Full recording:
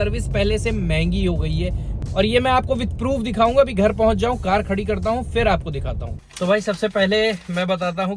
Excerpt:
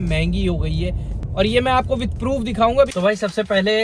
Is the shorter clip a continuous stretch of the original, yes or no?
no